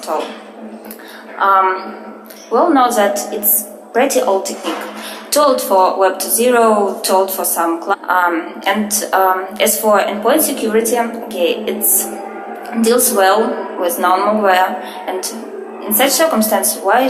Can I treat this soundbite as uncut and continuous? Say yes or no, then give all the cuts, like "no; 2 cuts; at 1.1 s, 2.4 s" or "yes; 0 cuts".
yes; 0 cuts